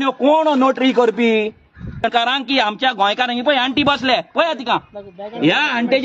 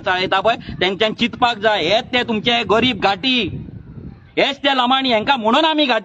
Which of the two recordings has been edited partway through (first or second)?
first